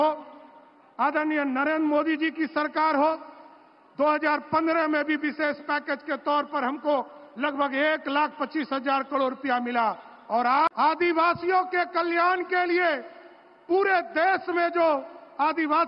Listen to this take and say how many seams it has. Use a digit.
1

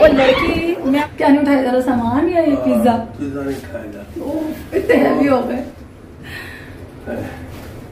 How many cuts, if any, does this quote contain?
1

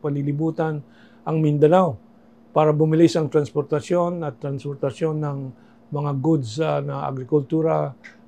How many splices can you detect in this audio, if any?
0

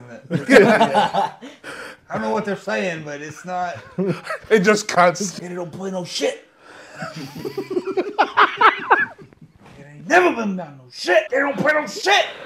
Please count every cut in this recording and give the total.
2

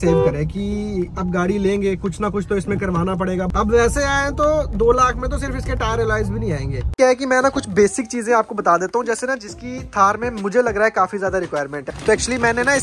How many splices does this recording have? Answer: 3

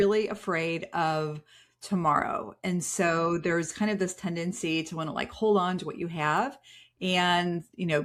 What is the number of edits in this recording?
0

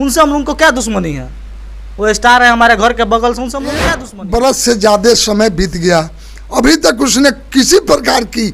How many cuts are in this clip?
1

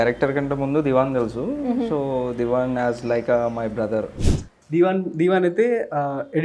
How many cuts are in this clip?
1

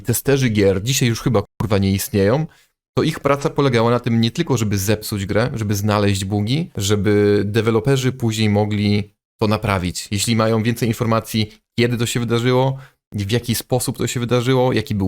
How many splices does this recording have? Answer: 1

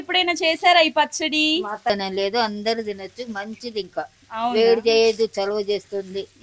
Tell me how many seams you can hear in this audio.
1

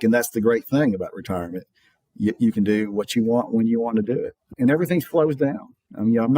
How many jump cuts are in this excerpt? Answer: 1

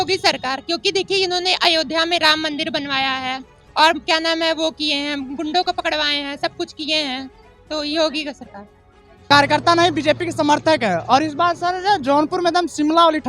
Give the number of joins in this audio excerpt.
1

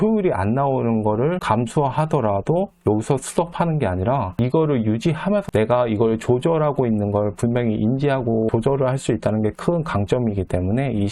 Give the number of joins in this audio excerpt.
3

